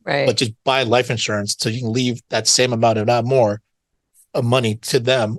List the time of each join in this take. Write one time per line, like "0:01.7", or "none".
none